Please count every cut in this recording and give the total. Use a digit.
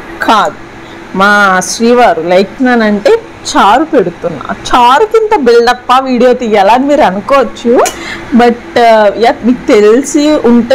1